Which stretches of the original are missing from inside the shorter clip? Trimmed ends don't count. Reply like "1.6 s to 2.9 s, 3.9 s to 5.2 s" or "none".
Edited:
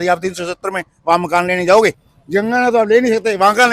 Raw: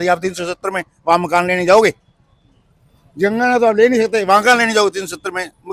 2.1 s to 3.0 s